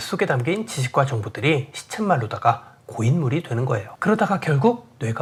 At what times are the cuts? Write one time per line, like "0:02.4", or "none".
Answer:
none